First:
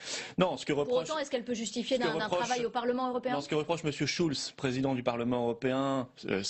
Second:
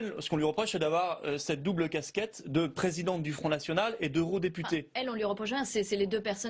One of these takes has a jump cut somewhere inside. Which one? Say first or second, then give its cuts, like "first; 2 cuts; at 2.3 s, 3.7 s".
second; 1 cut; at 2.7 s